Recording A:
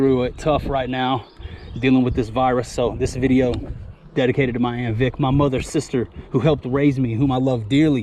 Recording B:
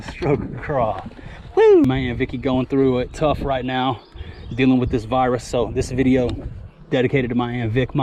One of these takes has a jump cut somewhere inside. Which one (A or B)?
B